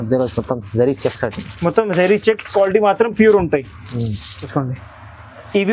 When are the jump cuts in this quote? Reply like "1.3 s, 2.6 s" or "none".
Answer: 4.4 s